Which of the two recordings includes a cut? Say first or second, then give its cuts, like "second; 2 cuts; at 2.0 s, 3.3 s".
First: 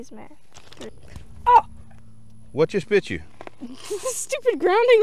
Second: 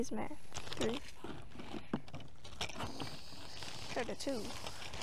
first; 1 cut; at 0.9 s